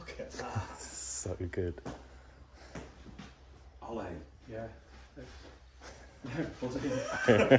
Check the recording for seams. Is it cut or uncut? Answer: uncut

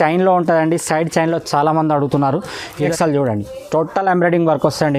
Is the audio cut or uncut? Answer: cut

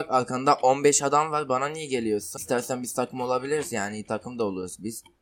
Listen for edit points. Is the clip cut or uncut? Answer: cut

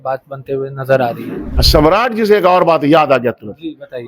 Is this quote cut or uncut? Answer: cut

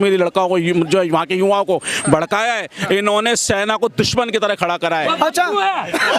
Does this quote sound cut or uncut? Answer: cut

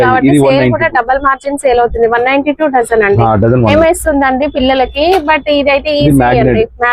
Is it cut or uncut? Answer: cut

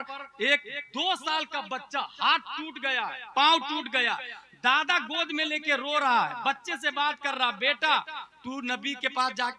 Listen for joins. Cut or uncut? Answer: uncut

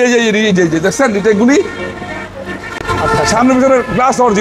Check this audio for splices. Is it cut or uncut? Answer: uncut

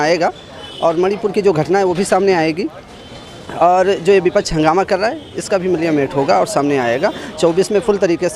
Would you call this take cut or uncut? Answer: uncut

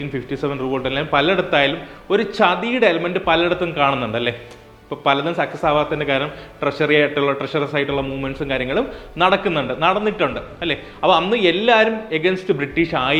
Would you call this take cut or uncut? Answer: uncut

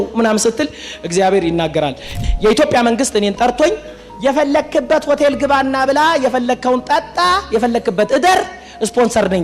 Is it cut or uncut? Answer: cut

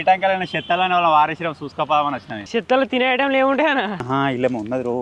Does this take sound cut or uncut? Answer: cut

